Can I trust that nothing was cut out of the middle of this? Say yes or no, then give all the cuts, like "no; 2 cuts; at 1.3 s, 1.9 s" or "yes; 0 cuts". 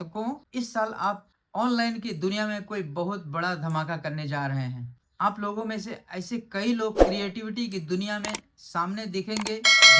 yes; 0 cuts